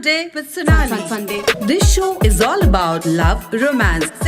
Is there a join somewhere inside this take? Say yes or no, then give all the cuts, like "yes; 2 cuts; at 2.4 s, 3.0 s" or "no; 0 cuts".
yes; 1 cut; at 1.5 s